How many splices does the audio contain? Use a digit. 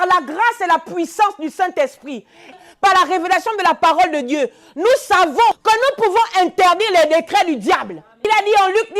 3